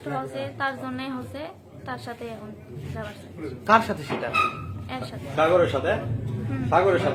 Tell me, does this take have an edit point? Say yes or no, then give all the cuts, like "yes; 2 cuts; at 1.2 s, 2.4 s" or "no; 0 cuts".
no; 0 cuts